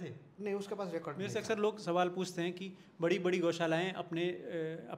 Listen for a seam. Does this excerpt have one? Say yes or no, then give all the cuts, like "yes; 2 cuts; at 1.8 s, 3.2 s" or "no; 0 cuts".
yes; 1 cut; at 1.1 s